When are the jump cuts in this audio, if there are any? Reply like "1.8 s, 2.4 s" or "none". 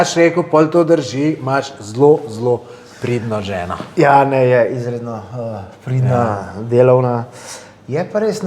none